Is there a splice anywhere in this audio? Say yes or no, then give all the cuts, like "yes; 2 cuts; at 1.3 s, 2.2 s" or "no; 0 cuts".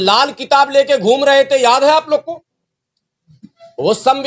no; 0 cuts